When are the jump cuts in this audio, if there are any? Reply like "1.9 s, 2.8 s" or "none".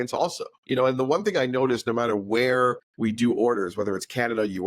2.9 s